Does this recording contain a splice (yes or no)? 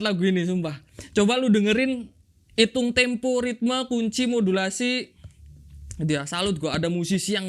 no